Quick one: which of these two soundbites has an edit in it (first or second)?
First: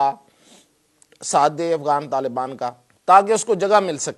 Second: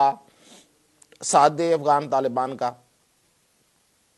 first